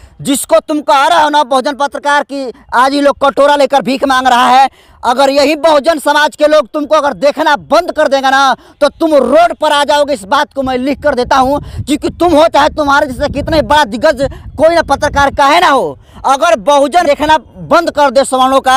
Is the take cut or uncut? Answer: uncut